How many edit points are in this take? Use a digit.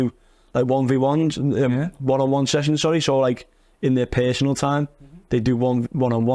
0